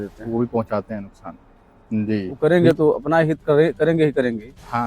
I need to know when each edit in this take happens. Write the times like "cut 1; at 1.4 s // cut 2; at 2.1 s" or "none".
cut 1; at 2.3 s